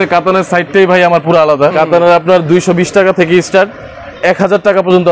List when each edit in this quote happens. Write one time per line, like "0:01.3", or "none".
0:01.7